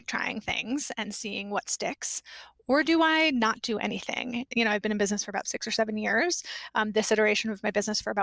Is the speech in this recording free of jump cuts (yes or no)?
no